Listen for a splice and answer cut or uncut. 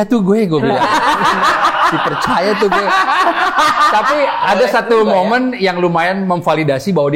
uncut